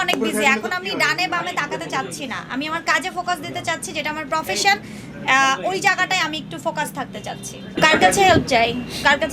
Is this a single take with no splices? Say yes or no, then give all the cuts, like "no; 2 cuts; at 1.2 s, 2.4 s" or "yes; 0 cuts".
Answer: yes; 0 cuts